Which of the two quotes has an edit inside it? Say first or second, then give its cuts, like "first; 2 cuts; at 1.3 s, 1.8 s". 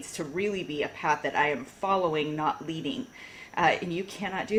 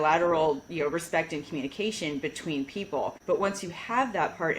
second; 1 cut; at 3.2 s